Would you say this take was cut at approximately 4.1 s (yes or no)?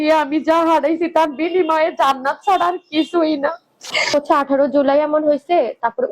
yes